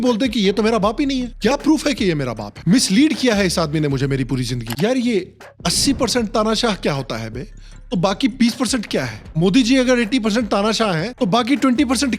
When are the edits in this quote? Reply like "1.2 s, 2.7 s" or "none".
4.7 s